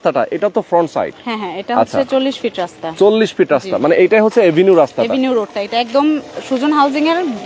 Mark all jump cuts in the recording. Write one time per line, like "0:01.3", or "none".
none